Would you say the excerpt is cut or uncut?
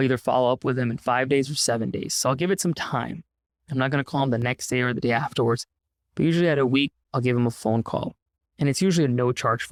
uncut